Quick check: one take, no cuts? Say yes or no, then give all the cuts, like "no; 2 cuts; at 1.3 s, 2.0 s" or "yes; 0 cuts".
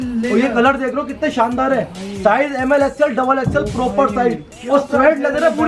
yes; 0 cuts